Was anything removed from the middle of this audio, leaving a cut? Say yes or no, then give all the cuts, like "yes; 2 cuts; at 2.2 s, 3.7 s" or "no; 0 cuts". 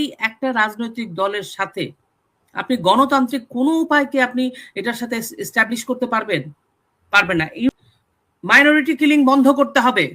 yes; 1 cut; at 7.7 s